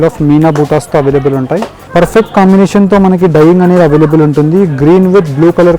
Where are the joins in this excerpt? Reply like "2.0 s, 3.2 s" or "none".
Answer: 1.8 s

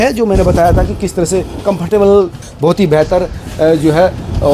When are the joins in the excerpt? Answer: 2.4 s

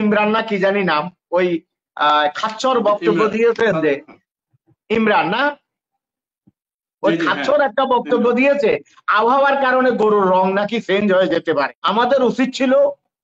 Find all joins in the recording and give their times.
11.7 s

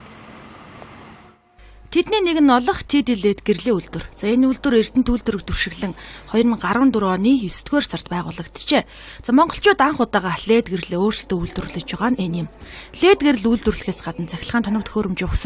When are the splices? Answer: 1.1 s

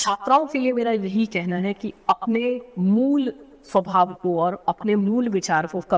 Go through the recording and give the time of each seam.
none

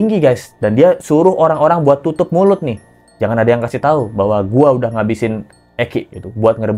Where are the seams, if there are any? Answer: none

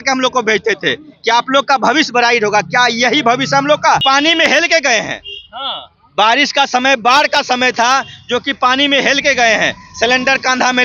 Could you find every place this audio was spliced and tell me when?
4.0 s

